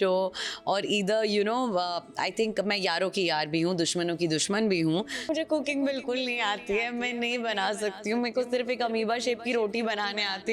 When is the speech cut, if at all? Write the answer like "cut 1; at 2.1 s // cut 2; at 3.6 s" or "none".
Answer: cut 1; at 5.3 s